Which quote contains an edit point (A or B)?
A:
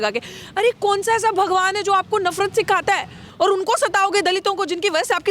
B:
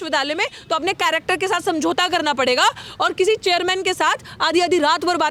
A